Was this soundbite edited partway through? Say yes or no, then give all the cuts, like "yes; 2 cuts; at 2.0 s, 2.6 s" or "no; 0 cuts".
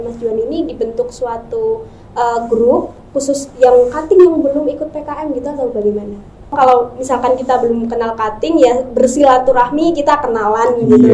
yes; 1 cut; at 6.5 s